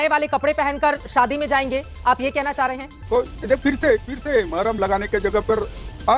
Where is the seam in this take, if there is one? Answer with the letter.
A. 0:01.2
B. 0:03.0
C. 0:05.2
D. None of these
B